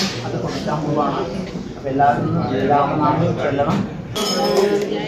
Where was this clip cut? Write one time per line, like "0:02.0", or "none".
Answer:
0:04.2